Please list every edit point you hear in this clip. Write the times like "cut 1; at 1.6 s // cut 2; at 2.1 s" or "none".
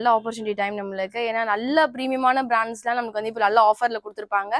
none